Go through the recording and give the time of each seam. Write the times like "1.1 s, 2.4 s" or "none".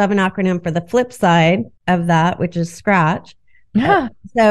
1.7 s